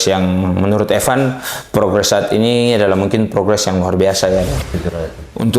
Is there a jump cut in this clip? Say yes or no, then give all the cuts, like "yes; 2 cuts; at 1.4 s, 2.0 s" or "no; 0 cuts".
yes; 1 cut; at 4.6 s